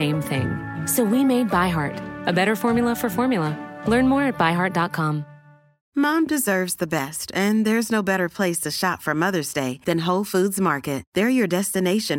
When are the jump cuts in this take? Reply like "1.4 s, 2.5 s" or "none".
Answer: 5.7 s